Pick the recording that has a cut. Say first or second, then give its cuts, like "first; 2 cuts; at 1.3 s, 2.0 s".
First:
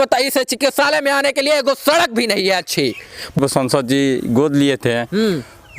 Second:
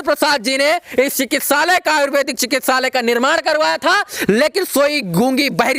first; 1 cut; at 3.4 s